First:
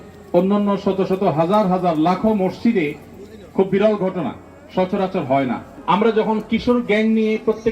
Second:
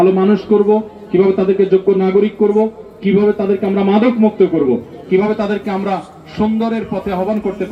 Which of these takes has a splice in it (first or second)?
first